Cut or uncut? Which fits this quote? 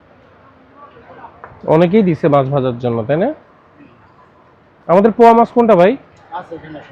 uncut